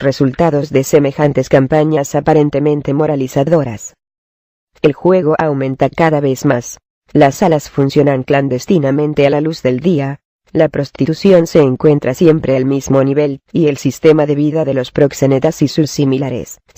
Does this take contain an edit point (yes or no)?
no